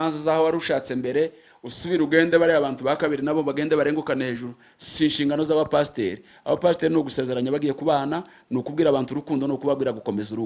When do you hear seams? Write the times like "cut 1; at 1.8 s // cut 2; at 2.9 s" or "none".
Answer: none